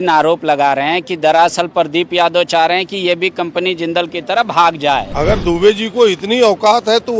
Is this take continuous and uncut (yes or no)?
no